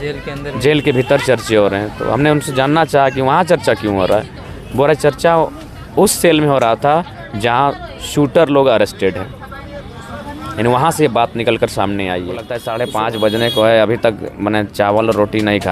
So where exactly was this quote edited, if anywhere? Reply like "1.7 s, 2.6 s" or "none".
12.6 s